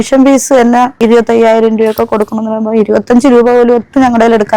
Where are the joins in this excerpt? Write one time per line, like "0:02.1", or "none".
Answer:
0:01.0